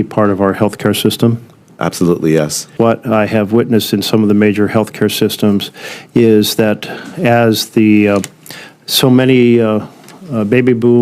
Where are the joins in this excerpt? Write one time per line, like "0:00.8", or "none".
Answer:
0:02.7